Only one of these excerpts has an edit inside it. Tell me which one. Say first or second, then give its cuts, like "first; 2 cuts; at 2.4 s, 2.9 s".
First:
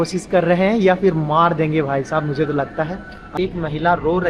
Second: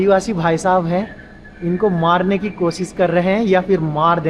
first; 1 cut; at 3.4 s